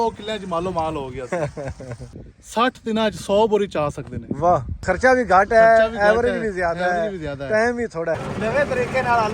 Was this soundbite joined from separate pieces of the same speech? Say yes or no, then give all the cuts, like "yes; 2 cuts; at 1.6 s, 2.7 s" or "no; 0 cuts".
yes; 3 cuts; at 1.9 s, 4.7 s, 8.2 s